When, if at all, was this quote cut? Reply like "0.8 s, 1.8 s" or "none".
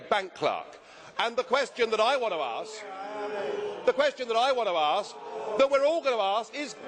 4.7 s

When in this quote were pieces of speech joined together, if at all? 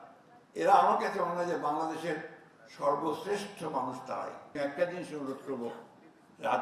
4.4 s

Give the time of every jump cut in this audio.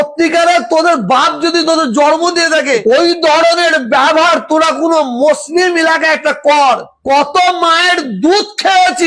2.8 s

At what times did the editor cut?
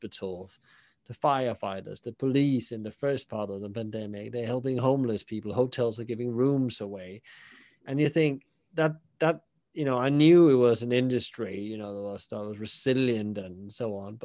none

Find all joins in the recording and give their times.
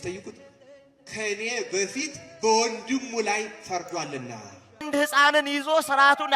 4.9 s

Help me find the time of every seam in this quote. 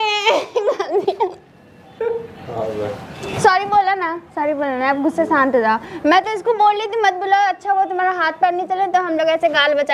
3.1 s

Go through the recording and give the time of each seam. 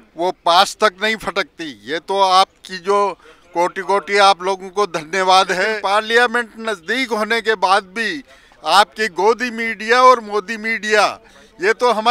5.8 s

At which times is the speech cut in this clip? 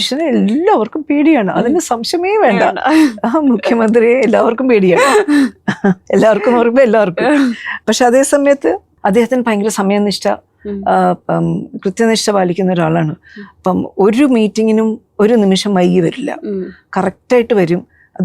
7.7 s

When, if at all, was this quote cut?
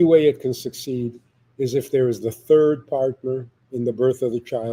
3.6 s

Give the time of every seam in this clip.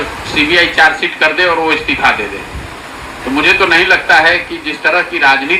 none

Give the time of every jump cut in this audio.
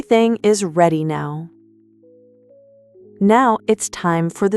1.5 s, 3.2 s

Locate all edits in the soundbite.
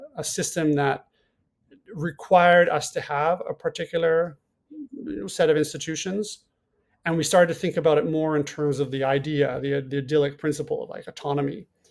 none

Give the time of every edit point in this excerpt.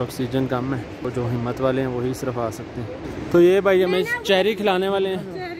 1.1 s, 3.1 s

